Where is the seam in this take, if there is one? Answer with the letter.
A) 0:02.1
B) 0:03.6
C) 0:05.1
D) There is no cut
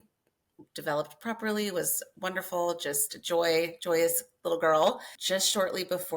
C